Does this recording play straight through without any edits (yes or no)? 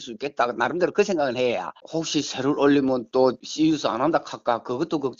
no